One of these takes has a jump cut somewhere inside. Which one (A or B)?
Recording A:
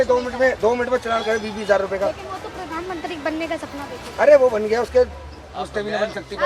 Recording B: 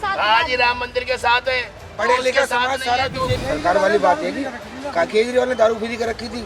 B